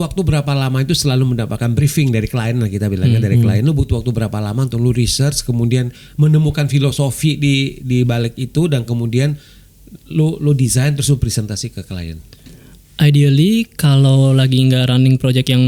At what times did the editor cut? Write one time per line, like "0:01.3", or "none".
none